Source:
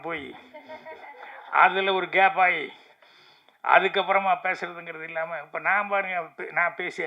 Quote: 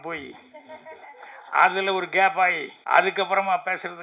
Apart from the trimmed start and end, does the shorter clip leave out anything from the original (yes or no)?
yes